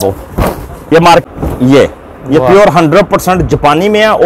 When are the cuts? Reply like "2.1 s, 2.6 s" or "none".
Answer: 1.2 s